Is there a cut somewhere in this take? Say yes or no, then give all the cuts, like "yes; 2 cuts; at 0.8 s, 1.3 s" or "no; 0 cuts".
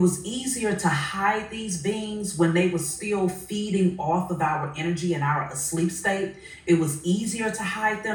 no; 0 cuts